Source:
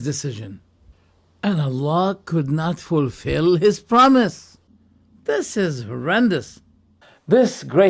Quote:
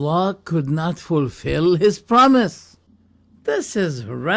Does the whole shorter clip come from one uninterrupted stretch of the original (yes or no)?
yes